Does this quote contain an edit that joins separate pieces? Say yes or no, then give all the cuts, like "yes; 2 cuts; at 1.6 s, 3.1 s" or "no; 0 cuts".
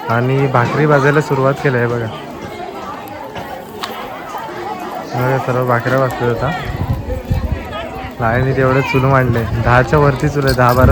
no; 0 cuts